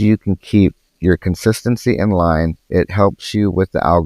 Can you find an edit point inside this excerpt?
yes; 2 cuts; at 0.9 s, 2.6 s

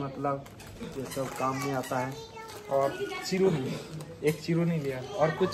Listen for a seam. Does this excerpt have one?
no; 0 cuts

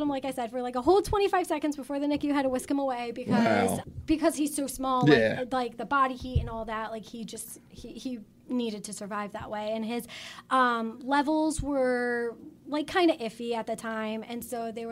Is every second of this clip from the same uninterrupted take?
no; 1 cut; at 3.8 s

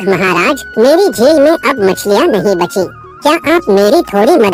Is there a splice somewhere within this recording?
no; 0 cuts

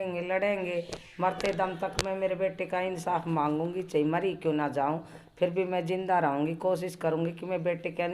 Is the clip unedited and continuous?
yes; 0 cuts

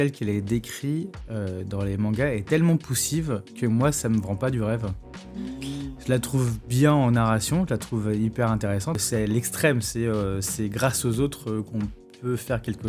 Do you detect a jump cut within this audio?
yes; 1 cut; at 9.0 s

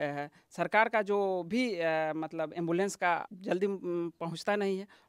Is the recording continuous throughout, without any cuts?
no; 1 cut; at 3.3 s

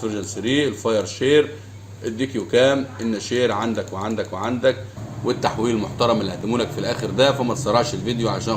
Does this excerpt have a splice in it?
yes; 1 cut; at 5.0 s

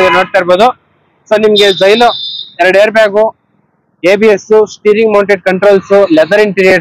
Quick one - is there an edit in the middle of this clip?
no; 0 cuts

